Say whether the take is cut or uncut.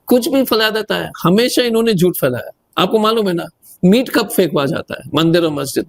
uncut